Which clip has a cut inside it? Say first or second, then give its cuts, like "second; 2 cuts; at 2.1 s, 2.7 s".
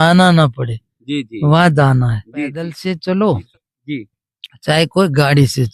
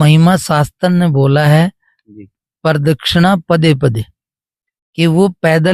first; 1 cut; at 2.7 s